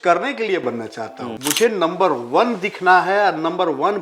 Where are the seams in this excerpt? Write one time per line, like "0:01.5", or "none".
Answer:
0:01.3